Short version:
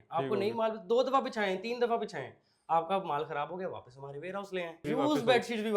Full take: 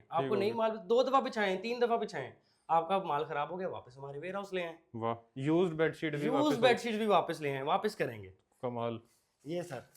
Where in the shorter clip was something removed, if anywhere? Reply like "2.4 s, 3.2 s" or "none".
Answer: 4.8 s